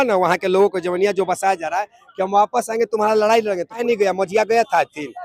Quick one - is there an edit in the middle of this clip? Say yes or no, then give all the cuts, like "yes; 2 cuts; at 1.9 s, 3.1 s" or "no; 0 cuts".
yes; 1 cut; at 3.8 s